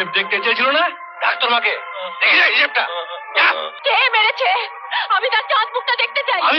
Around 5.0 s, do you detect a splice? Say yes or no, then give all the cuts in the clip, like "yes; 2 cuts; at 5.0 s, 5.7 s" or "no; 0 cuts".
no; 1 cut; at 3.7 s